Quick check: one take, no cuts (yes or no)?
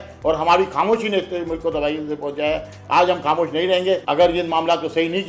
no